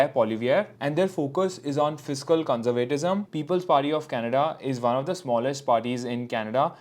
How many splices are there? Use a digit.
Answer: 1